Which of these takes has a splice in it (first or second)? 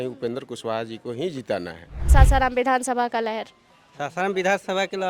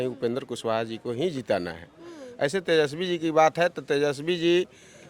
first